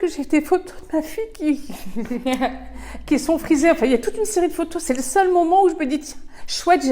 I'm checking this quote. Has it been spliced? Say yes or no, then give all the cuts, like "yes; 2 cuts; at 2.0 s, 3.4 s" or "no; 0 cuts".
no; 0 cuts